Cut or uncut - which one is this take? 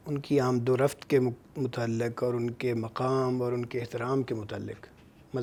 uncut